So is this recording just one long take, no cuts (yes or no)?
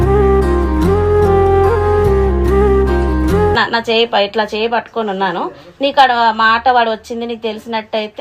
yes